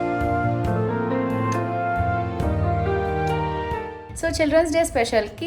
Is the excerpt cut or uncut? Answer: cut